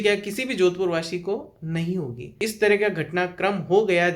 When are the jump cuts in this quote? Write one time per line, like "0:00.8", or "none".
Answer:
0:02.3